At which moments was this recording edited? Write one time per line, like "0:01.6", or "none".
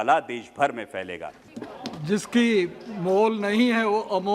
0:01.3